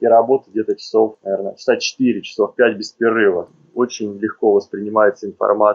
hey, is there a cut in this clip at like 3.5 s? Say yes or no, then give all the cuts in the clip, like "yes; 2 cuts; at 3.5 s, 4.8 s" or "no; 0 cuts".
yes; 2 cuts; at 1.2 s, 3.5 s